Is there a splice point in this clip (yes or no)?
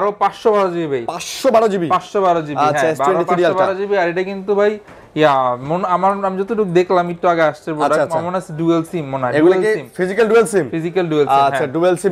no